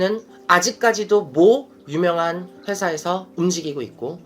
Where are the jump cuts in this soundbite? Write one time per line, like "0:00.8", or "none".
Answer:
none